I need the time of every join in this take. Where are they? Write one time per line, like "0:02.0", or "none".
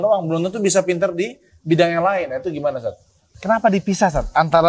0:03.4